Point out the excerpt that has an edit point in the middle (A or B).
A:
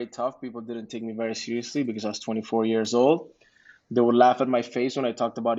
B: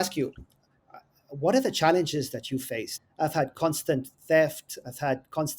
B